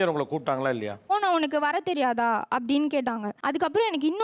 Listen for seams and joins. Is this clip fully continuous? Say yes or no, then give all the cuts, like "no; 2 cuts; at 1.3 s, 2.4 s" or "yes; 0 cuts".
no; 2 cuts; at 1.1 s, 3.3 s